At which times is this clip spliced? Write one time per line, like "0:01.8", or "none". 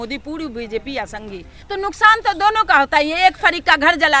0:01.6